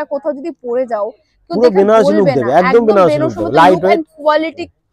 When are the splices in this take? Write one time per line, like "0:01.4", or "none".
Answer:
none